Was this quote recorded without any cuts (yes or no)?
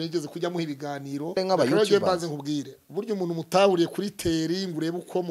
no